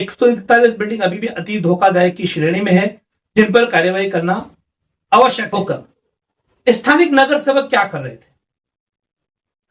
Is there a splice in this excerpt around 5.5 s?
yes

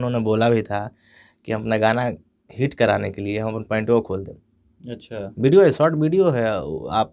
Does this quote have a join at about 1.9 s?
no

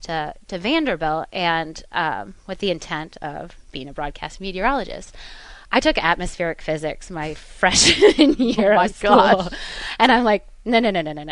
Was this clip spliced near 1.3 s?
no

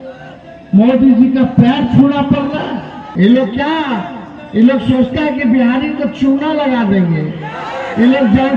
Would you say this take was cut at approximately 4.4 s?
no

